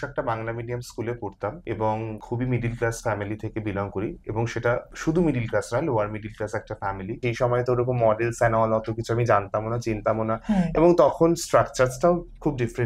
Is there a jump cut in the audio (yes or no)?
yes